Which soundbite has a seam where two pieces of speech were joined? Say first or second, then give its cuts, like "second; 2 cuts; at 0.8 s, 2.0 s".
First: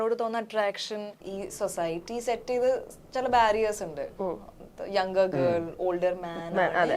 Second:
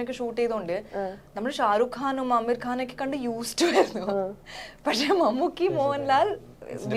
first; 1 cut; at 1.2 s